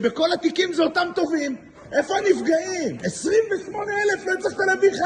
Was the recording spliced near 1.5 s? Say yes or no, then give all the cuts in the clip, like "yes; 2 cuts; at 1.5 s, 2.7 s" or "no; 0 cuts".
no; 1 cut; at 3.1 s